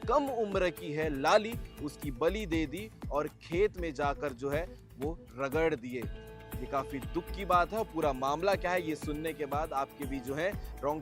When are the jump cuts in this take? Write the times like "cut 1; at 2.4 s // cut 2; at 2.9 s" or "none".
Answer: none